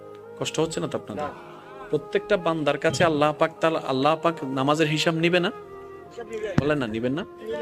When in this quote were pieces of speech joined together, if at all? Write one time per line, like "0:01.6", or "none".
none